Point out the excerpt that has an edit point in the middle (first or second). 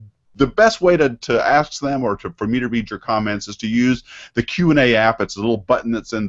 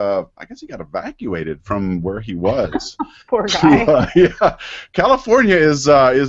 second